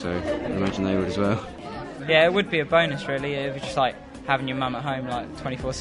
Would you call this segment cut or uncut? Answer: cut